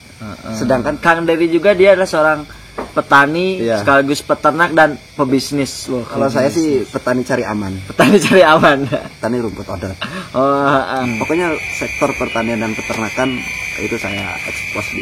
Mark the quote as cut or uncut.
cut